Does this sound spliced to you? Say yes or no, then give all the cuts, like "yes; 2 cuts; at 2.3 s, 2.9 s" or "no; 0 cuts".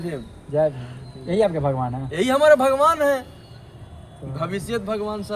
no; 0 cuts